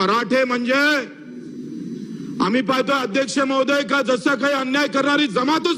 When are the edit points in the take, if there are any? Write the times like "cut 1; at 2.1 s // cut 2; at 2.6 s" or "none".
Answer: none